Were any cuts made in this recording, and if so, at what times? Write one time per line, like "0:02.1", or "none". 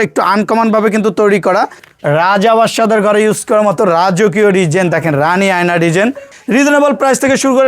0:01.8
0:06.3